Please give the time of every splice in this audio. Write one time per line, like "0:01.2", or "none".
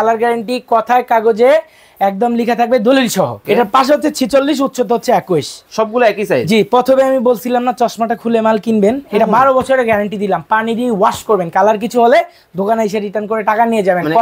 0:03.4